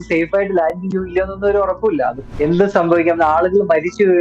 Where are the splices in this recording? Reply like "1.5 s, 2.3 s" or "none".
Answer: 2.2 s